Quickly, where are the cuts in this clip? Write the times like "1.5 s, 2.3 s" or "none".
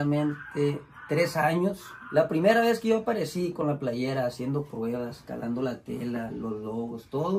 none